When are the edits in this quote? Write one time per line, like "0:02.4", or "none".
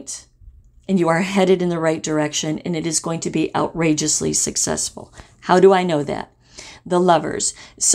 none